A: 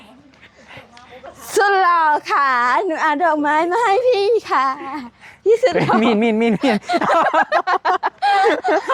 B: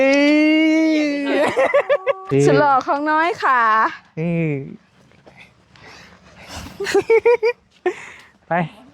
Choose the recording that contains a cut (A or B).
B